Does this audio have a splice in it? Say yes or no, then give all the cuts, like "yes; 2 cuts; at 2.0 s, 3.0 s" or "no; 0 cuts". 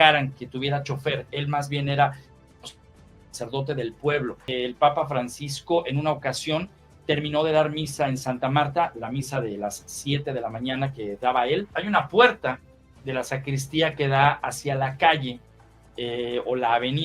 yes; 2 cuts; at 4.4 s, 11.7 s